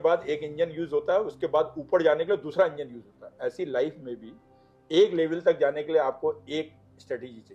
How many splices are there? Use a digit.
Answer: 0